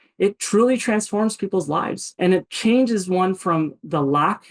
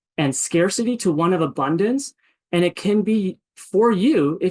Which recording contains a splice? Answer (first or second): first